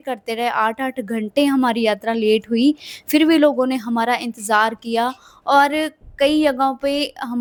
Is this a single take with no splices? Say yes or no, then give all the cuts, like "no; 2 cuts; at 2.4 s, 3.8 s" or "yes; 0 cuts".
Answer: yes; 0 cuts